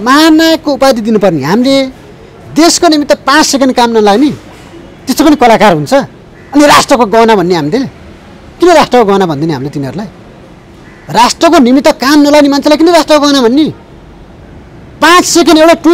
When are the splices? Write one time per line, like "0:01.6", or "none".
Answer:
none